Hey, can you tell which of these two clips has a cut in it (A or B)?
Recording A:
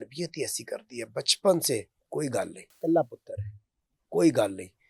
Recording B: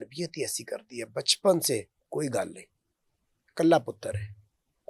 A